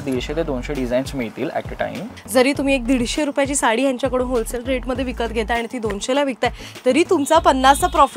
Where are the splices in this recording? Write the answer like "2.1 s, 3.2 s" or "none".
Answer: 2.2 s